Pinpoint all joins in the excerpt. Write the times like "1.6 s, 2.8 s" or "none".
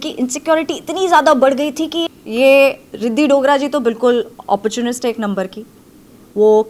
2.1 s